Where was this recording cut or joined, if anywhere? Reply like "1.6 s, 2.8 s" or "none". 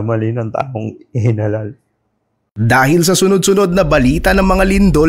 2.5 s